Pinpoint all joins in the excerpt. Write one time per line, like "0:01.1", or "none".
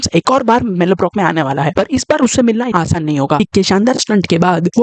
0:03.4